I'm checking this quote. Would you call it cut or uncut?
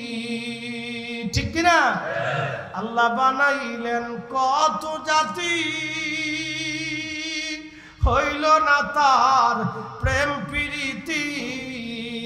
uncut